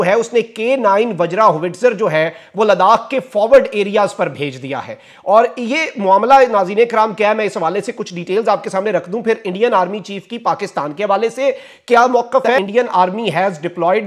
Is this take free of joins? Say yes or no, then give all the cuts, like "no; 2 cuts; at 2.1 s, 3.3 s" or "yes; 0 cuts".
yes; 0 cuts